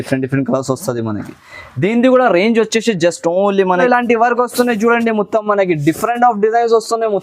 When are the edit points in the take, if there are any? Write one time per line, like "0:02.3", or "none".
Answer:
0:03.8